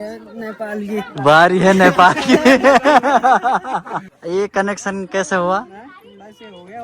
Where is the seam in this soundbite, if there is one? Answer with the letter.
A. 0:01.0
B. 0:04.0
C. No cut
B